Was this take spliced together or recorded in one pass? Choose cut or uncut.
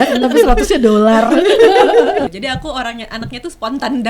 cut